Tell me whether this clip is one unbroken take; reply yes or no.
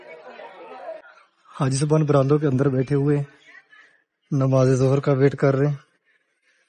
no